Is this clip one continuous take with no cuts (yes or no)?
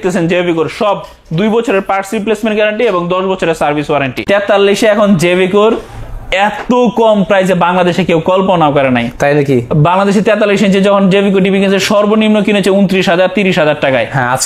no